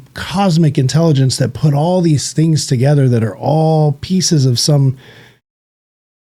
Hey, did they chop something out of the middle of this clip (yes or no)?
no